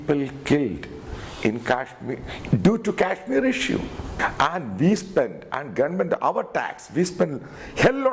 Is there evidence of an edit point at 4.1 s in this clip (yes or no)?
yes